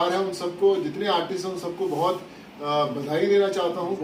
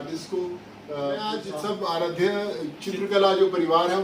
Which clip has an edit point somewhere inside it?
second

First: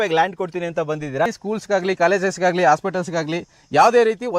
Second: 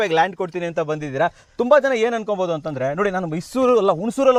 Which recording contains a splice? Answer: first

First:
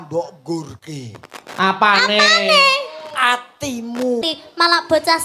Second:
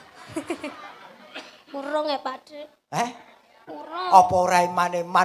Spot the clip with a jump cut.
first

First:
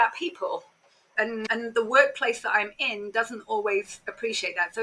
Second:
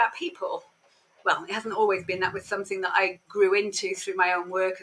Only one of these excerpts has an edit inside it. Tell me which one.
first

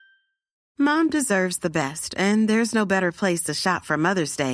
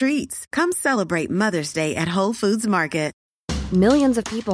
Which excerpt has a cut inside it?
second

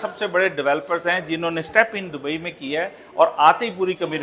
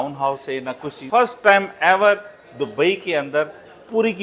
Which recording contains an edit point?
second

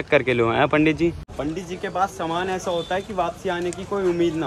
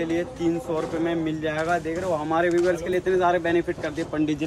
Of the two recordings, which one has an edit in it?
first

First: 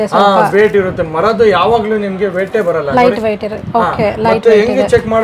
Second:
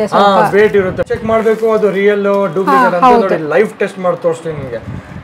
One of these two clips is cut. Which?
second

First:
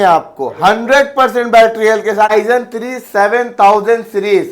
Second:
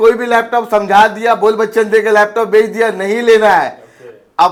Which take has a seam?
first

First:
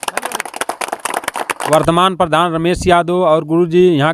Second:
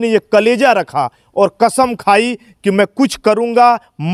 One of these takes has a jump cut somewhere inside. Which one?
first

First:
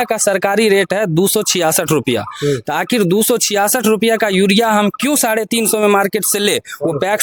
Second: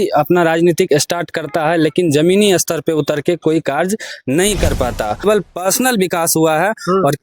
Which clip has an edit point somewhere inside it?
second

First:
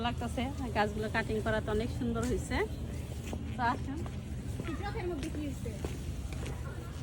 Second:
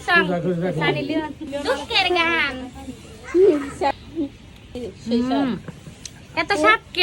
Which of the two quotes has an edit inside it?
second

